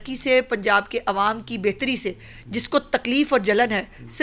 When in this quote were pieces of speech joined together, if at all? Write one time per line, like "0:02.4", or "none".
none